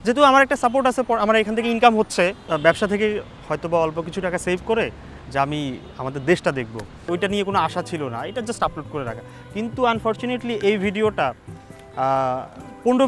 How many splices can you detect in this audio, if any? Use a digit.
2